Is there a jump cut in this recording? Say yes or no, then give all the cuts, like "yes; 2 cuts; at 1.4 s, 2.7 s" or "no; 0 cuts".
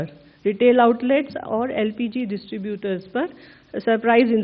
no; 0 cuts